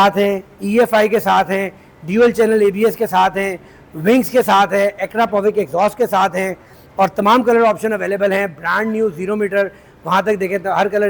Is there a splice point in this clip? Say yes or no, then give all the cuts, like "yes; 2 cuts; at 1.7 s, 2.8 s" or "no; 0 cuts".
no; 0 cuts